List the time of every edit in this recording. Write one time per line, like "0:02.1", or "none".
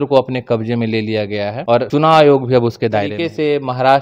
0:01.8
0:03.2

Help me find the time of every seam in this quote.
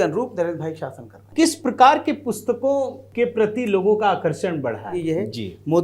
0:01.3
0:03.0
0:04.9

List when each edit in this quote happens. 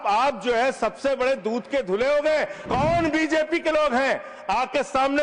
0:02.6

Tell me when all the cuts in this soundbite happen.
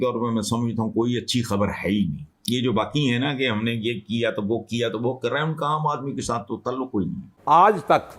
0:07.3

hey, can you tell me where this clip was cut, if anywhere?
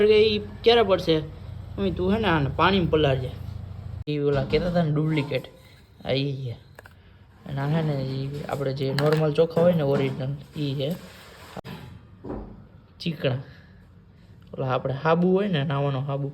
0:04.1
0:11.6

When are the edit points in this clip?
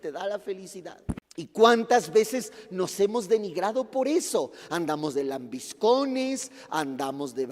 0:01.2

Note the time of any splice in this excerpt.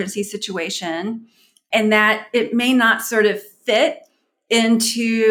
0:01.6

